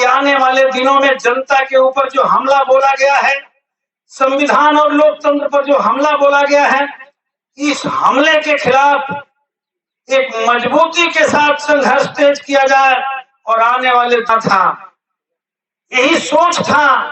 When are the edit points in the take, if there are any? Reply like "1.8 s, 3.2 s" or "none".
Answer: 14.3 s